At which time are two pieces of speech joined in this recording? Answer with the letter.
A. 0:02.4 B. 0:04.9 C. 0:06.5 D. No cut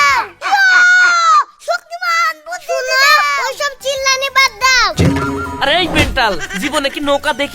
B